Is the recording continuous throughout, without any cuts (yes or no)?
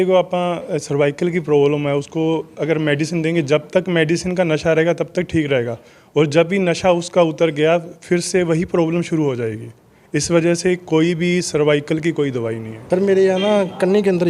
no